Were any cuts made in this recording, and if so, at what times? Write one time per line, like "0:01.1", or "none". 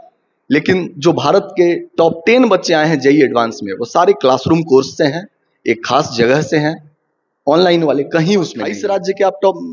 0:08.7